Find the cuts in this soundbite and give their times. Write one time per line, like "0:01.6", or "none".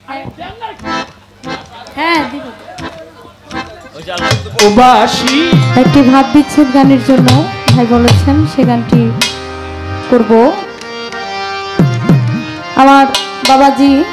none